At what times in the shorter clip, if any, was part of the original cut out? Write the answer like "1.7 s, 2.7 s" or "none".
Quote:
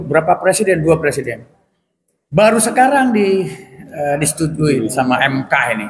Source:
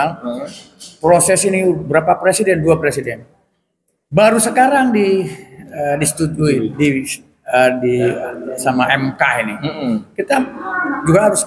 4.9 s